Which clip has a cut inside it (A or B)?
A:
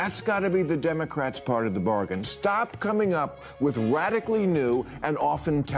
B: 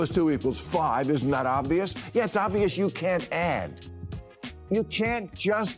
B